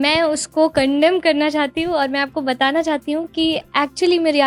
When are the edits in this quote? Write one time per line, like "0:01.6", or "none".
none